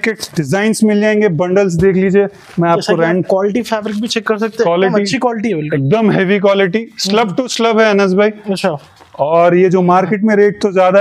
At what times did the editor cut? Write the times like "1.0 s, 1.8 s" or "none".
none

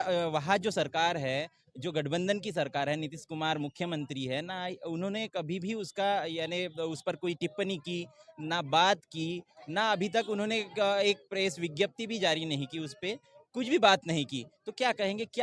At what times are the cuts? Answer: none

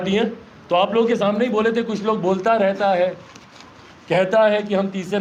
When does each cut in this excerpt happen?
none

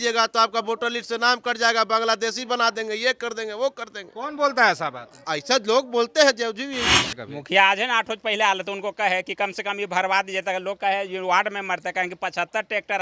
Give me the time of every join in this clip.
7.1 s

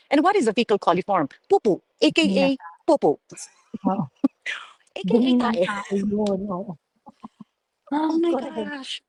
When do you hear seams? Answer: none

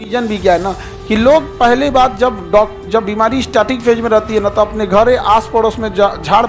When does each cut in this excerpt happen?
none

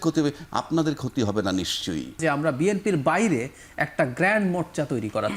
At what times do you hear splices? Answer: 2.2 s

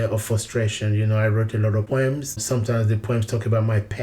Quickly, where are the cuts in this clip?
2.0 s

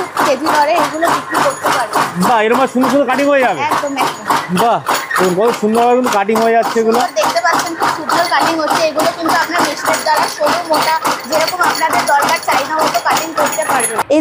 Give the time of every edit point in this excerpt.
none

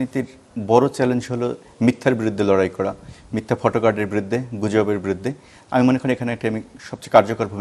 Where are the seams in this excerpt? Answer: none

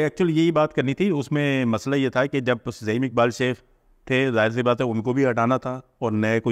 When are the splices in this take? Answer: none

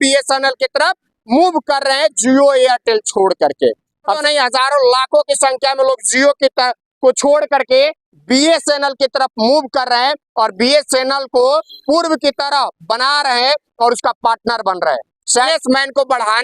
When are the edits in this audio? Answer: 4.2 s, 15.5 s

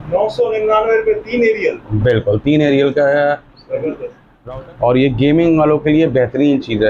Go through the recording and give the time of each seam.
4.3 s

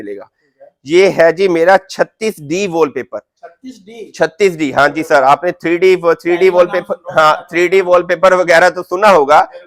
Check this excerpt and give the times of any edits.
none

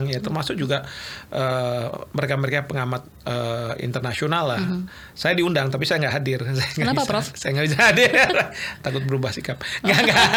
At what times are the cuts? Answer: none

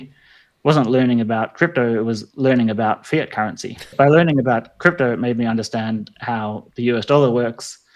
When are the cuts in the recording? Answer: 3.9 s

